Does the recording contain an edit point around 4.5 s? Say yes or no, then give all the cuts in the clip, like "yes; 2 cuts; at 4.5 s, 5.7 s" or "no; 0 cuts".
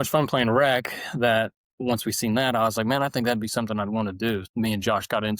yes; 1 cut; at 4.5 s